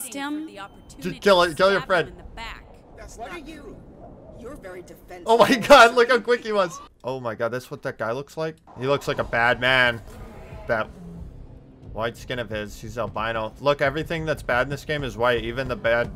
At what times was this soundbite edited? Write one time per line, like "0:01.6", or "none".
0:06.9
0:08.7